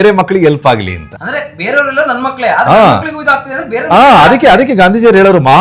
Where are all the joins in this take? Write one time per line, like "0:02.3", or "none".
none